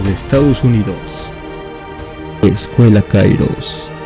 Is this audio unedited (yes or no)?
no